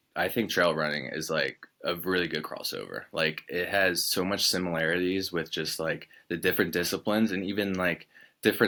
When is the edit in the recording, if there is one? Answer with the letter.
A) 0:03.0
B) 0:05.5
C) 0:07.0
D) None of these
D